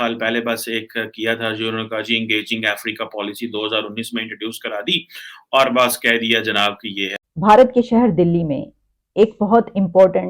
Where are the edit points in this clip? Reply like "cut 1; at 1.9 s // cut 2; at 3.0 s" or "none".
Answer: cut 1; at 7.1 s